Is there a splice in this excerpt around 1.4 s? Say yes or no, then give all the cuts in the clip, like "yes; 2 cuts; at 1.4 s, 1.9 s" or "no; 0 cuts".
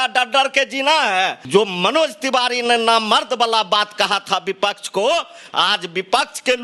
yes; 2 cuts; at 1.4 s, 5.4 s